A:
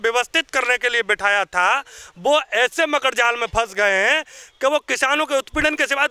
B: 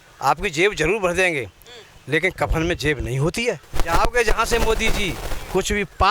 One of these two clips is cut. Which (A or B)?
B